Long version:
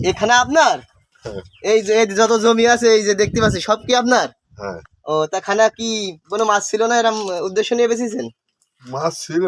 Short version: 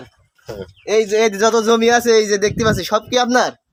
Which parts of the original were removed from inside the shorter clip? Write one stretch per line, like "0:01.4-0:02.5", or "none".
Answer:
none